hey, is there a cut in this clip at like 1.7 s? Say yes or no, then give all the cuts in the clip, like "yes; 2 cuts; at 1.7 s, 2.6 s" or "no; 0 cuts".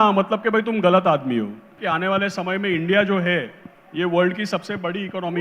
yes; 1 cut; at 1.7 s